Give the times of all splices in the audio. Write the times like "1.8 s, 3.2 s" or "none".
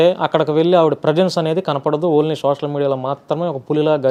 none